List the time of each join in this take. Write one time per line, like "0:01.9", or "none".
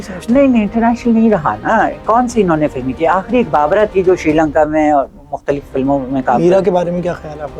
none